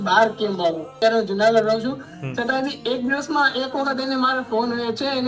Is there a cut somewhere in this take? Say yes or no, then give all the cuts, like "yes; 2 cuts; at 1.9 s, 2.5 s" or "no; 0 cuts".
yes; 1 cut; at 1.0 s